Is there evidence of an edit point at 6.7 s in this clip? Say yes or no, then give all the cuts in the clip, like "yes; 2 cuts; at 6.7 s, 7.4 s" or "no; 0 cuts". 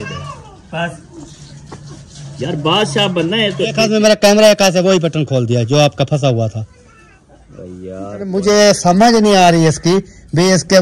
no; 2 cuts; at 3.8 s, 8.3 s